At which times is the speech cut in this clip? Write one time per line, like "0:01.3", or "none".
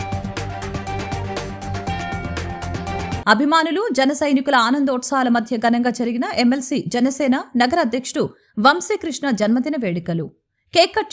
0:03.2